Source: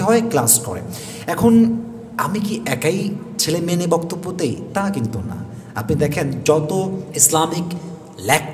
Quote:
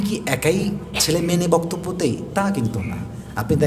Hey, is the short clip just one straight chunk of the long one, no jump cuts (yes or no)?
yes